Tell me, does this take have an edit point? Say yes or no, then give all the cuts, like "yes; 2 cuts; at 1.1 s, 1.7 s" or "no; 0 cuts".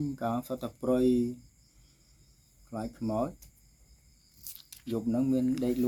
no; 0 cuts